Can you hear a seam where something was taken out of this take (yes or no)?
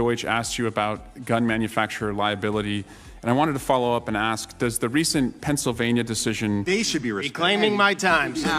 yes